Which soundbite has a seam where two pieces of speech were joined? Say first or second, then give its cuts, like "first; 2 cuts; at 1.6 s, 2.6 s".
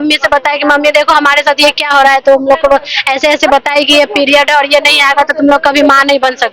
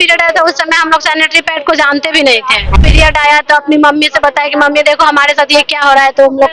second; 1 cut; at 2.7 s